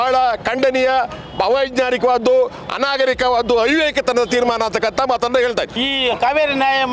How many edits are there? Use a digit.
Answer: 1